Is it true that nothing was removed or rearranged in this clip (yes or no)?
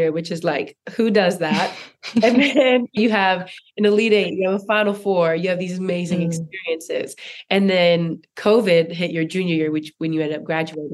yes